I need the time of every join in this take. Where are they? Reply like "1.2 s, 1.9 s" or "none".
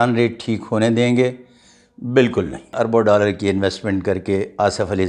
2.7 s